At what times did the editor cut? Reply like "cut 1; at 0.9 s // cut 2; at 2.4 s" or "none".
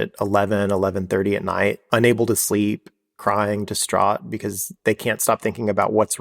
cut 1; at 1.8 s